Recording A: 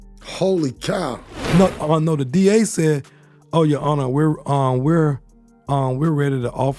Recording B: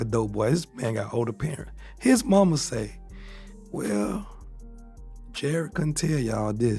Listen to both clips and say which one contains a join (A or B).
A